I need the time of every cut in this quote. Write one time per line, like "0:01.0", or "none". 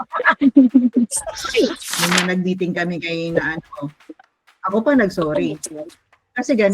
0:01.9